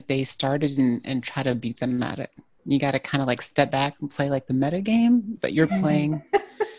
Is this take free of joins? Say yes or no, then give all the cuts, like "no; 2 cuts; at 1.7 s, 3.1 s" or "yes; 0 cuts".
no; 1 cut; at 5.4 s